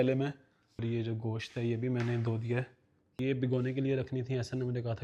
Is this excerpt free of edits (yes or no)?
no